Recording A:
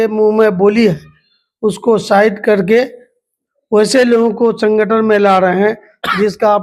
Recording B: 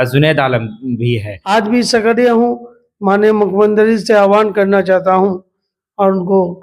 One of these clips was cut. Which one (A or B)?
B